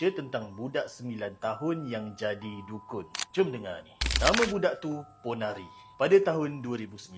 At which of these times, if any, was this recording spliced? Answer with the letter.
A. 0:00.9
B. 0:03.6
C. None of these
C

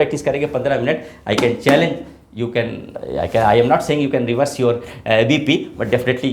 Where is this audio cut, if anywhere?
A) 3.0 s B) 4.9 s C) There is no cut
A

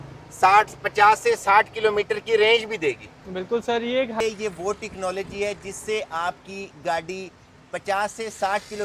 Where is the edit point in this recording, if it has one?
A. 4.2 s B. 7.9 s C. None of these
A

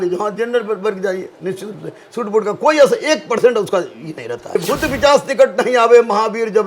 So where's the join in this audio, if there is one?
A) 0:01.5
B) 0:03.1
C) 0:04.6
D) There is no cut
C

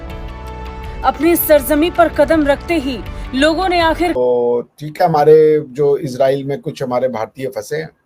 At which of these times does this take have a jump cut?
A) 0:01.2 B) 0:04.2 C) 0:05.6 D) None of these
B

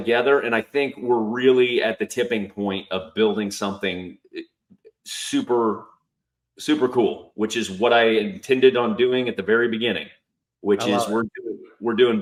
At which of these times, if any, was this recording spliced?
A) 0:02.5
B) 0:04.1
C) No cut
C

